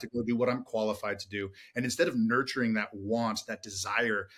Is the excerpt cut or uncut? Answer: uncut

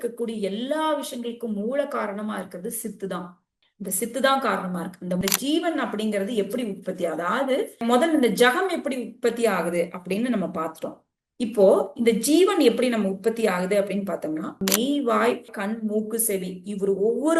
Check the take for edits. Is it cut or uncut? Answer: cut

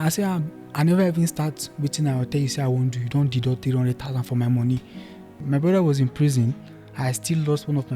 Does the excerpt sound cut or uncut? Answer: cut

